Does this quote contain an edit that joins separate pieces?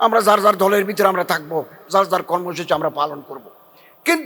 no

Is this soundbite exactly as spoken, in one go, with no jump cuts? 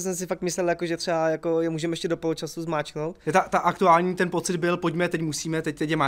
yes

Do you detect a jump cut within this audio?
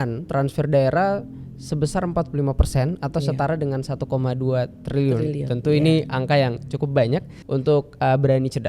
yes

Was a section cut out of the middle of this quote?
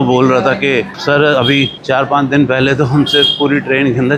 no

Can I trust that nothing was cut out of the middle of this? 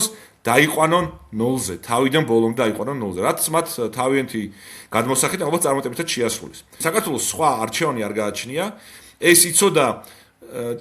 no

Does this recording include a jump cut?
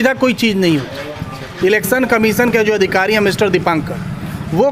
no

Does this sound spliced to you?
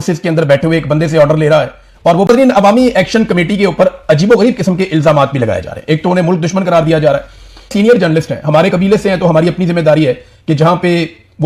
no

